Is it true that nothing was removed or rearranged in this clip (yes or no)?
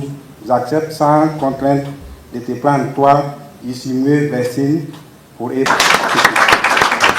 no